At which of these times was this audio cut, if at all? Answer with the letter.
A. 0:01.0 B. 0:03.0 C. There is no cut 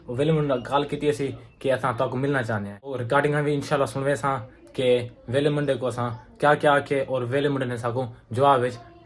B